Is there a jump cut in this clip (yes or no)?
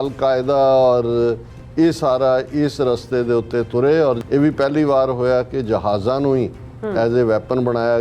yes